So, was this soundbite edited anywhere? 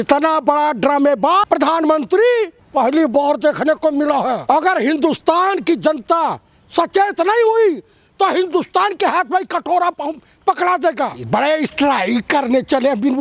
yes; 4 cuts; at 1.4 s, 2.6 s, 4.4 s, 11.2 s

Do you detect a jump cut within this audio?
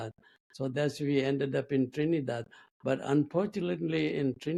no; 0 cuts

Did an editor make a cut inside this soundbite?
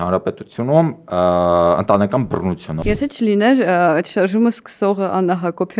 yes; 1 cut; at 2.7 s

